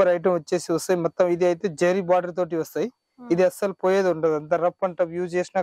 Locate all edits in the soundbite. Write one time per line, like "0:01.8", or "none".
none